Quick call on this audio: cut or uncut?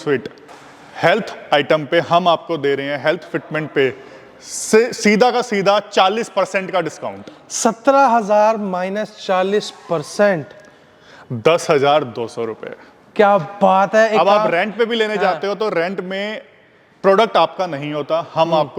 uncut